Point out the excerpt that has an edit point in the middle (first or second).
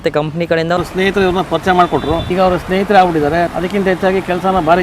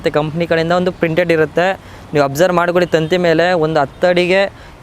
first